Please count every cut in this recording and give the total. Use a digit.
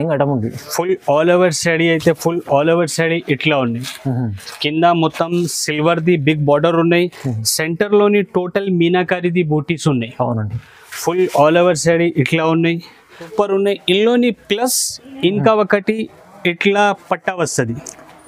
1